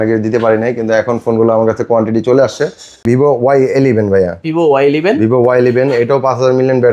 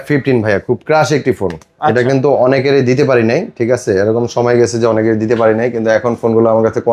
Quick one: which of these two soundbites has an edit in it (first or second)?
first